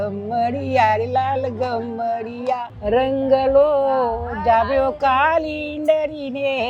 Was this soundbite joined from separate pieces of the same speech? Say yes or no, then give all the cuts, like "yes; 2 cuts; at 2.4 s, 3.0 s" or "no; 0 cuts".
no; 0 cuts